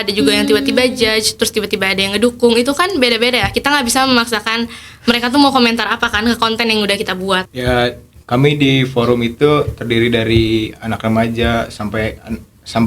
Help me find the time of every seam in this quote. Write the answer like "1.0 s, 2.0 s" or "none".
7.5 s